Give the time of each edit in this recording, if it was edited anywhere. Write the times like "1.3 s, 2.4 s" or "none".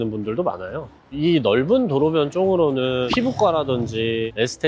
1.2 s